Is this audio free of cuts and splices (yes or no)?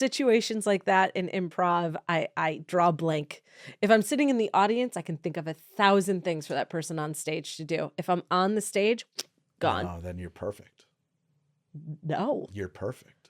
yes